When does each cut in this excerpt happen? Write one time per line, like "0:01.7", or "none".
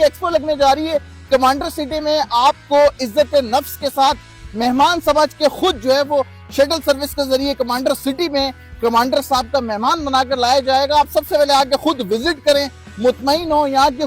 none